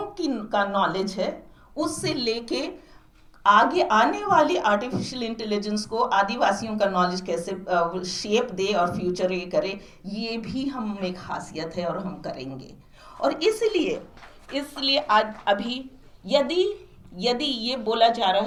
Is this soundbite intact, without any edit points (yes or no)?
yes